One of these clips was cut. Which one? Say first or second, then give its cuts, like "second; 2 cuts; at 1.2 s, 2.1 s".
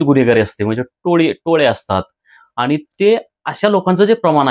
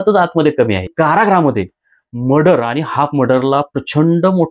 second; 1 cut; at 0.9 s